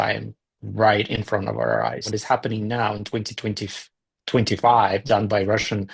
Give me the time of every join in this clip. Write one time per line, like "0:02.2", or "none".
0:02.1